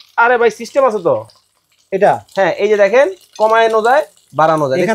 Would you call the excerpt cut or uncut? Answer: uncut